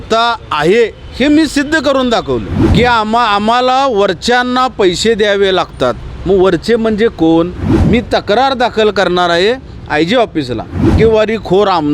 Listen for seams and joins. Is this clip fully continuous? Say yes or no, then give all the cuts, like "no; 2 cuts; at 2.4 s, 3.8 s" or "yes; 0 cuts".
no; 3 cuts; at 2.6 s, 7.7 s, 10.9 s